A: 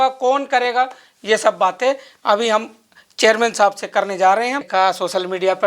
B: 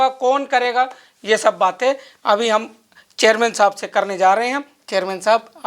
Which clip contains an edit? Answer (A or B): A